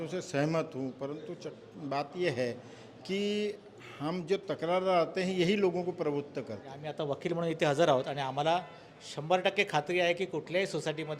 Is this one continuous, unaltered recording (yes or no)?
no